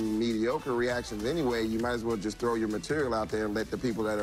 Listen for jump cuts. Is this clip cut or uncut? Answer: uncut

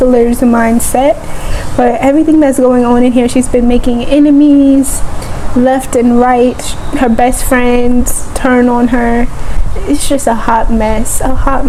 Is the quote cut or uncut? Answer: uncut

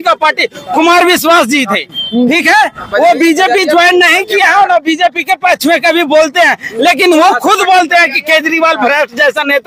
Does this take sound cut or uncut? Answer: uncut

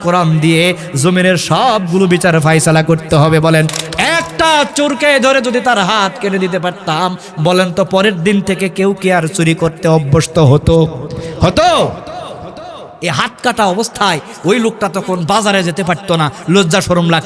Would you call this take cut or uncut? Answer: cut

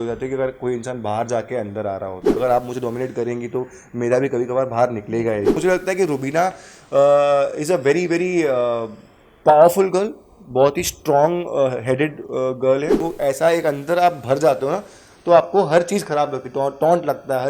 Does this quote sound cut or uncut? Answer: cut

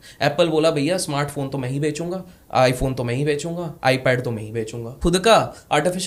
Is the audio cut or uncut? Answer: cut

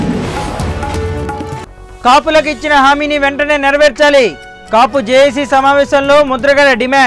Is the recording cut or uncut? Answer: cut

